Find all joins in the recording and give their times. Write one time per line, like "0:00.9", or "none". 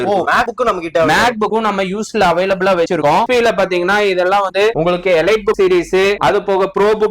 0:03.3